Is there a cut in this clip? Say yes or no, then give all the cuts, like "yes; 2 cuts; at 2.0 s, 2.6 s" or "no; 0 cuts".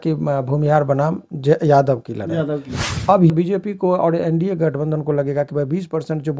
yes; 1 cut; at 3.3 s